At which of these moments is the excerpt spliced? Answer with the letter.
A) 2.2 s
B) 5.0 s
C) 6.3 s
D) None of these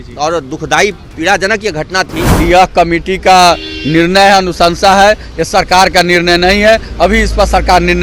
A